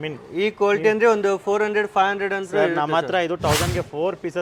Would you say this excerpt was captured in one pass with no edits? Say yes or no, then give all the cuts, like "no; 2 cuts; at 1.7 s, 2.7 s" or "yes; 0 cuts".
yes; 0 cuts